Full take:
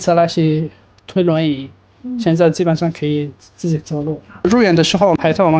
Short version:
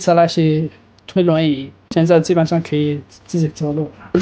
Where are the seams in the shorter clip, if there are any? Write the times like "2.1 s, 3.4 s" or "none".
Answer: 1.8 s